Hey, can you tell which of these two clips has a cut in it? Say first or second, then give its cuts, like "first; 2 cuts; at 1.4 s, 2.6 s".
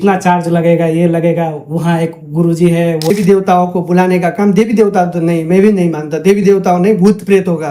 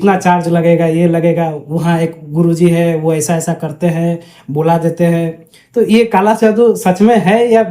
first; 1 cut; at 3.1 s